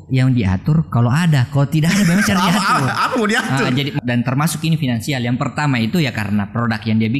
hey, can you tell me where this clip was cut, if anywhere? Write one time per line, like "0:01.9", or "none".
0:04.0